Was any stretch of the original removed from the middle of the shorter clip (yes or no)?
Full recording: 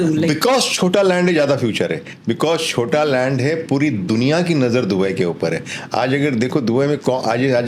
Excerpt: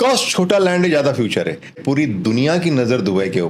yes